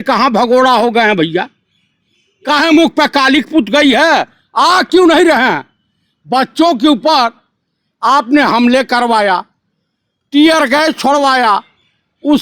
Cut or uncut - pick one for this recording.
uncut